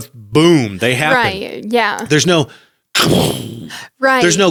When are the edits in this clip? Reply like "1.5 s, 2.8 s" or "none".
none